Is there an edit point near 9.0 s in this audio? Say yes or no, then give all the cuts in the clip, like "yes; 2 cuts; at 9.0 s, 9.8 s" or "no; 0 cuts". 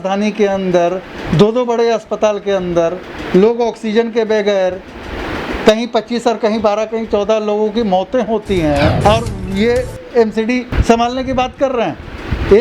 yes; 2 cuts; at 9.0 s, 10.7 s